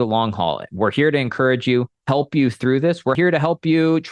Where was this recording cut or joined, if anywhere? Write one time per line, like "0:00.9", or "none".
0:02.0
0:03.1